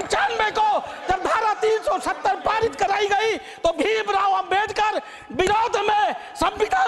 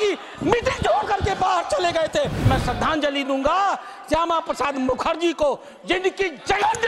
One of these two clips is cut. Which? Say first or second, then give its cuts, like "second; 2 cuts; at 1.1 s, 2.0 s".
second; 1 cut; at 2.4 s